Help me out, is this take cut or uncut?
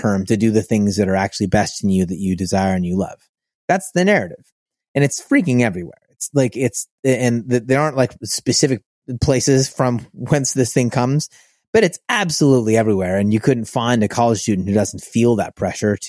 uncut